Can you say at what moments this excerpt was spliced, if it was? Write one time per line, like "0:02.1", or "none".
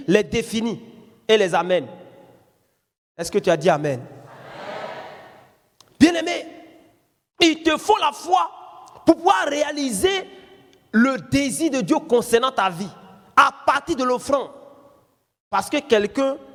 none